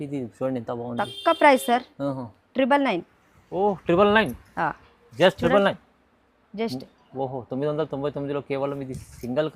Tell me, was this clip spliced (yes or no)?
no